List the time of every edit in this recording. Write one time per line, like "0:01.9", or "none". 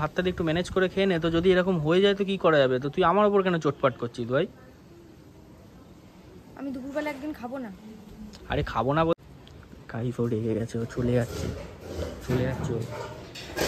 0:09.1